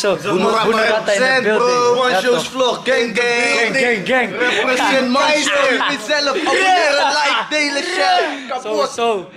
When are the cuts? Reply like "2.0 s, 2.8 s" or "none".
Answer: none

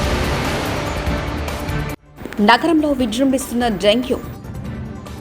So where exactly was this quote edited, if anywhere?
2.0 s

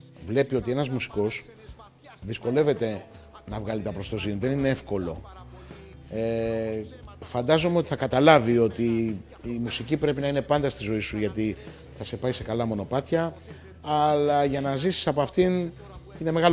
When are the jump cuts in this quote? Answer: none

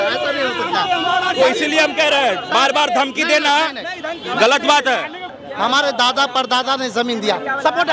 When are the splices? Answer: 5.3 s

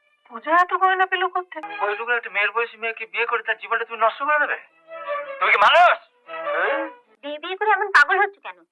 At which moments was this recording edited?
1.7 s, 7.1 s

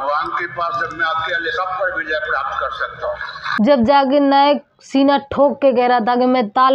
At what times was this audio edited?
3.4 s

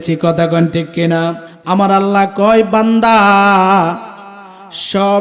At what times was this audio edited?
1.5 s

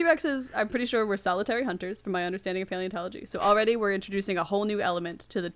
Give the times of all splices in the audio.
none

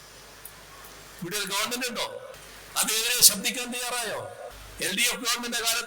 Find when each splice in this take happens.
2.4 s, 4.6 s

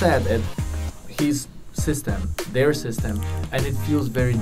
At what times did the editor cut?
none

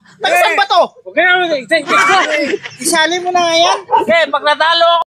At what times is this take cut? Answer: 4.0 s

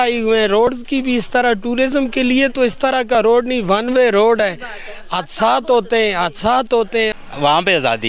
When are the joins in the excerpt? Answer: 7.1 s

